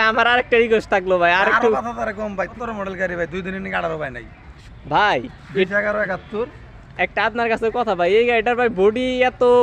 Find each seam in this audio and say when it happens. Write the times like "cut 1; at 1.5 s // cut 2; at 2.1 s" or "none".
cut 1; at 2.5 s // cut 2; at 4.6 s